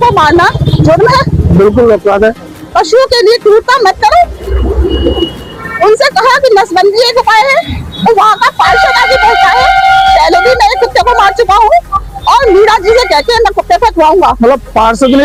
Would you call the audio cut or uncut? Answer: uncut